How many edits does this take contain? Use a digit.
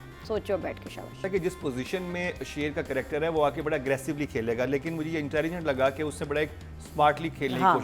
1